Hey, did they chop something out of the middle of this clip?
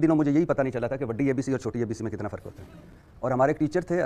no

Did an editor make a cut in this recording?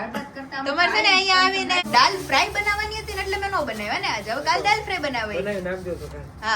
yes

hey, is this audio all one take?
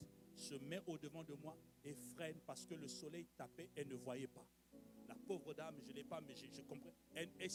yes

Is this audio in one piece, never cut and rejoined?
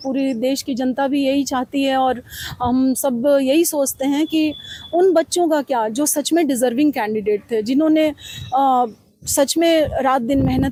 yes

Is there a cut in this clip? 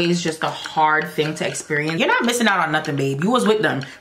yes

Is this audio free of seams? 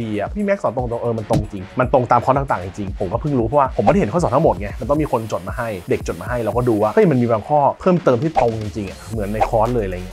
yes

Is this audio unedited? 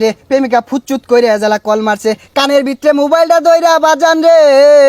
yes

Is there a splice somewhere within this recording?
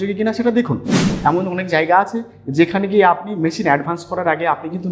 yes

